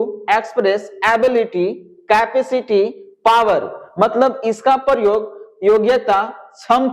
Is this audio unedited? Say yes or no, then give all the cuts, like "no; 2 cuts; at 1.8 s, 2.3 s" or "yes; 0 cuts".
yes; 0 cuts